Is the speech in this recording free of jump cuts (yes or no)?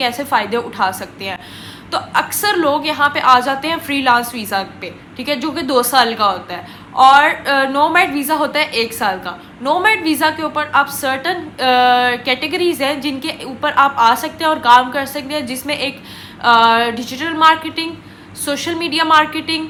yes